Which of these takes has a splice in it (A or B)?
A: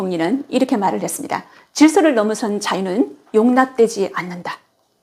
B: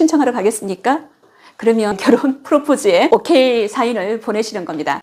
B